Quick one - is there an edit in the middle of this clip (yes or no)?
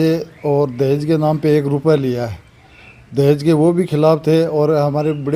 no